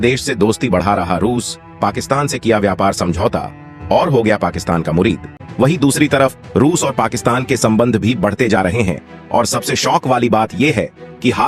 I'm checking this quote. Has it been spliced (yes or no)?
no